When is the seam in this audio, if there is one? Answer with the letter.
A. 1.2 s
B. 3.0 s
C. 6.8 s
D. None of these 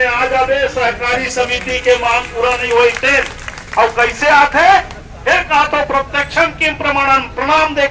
D